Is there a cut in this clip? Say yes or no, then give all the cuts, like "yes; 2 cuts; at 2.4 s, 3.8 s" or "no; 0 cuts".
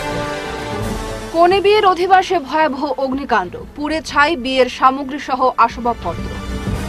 yes; 1 cut; at 0.9 s